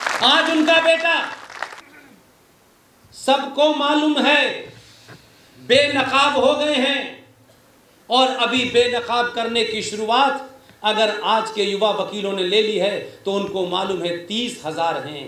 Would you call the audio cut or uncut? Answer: cut